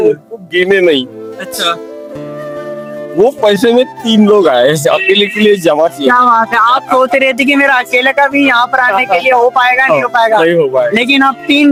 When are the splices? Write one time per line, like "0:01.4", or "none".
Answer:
none